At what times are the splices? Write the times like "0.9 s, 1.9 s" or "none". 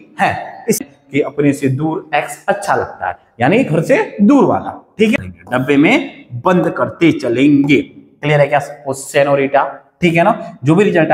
0.8 s, 5.1 s